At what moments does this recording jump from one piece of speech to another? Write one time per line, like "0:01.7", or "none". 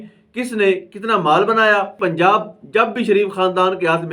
0:02.0